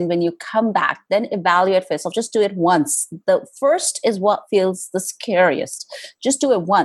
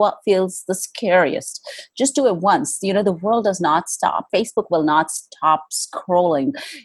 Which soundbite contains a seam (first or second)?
second